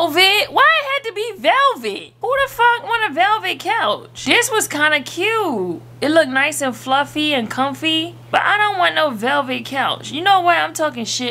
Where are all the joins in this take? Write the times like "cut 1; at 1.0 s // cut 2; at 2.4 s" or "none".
none